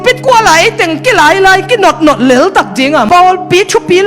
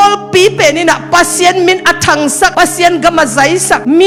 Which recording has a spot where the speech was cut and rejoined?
first; 1 cut; at 3.1 s

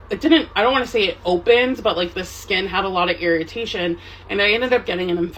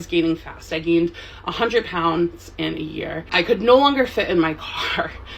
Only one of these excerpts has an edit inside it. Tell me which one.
second; 1 cut; at 3.2 s

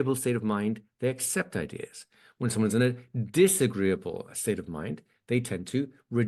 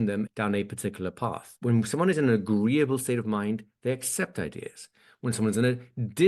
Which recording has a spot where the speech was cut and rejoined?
second; 1 cut; at 1.5 s

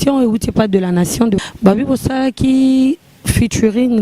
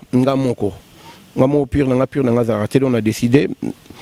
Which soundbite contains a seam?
first; 1 cut; at 1.4 s

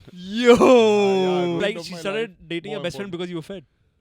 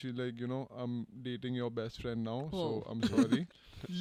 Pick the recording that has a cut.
first; 1 cut; at 1.6 s

